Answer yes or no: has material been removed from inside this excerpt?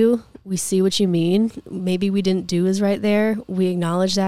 no